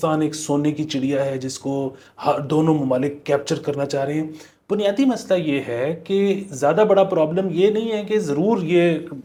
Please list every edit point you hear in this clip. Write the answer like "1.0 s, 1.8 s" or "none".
none